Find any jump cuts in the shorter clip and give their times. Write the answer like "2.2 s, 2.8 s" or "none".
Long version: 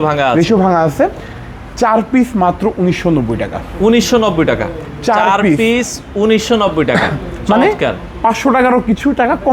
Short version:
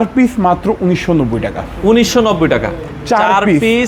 none